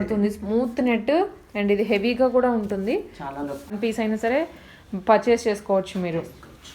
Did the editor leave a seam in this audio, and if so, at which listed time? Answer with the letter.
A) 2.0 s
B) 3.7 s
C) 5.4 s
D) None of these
B